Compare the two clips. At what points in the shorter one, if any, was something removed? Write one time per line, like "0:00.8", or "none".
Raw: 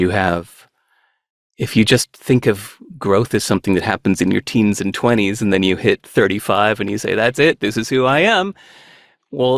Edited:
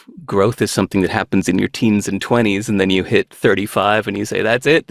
none

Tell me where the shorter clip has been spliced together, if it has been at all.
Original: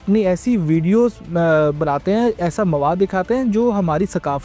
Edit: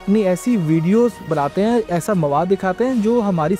0:01.3

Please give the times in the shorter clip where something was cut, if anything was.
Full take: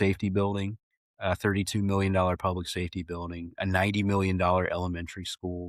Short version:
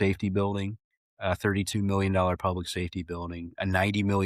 none

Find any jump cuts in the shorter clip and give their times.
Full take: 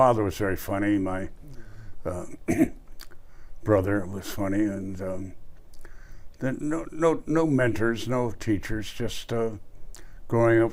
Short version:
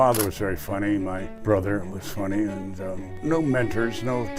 0:01.3
0:03.2

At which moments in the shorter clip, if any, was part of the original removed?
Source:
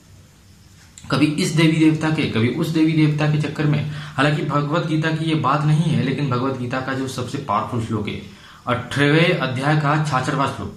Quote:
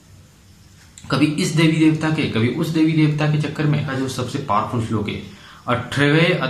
0:03.9

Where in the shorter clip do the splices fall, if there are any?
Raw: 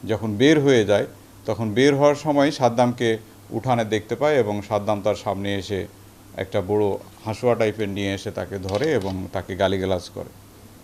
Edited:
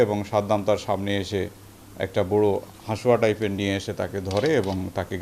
none

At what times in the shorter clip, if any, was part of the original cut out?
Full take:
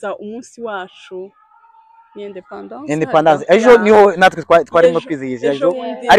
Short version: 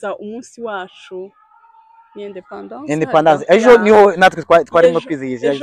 none

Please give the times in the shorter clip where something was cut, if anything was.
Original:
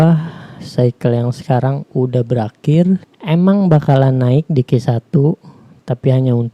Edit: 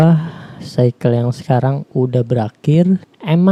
none

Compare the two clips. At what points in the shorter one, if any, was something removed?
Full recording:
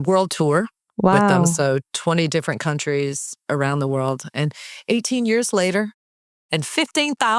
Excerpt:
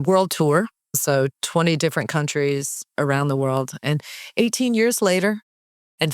0:01.0

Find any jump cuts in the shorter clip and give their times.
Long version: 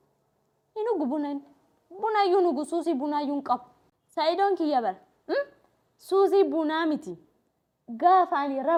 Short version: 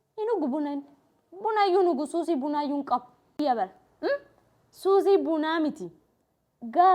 0:03.4

